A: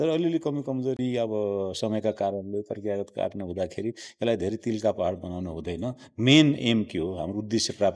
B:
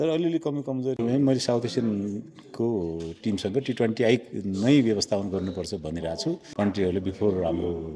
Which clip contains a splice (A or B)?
B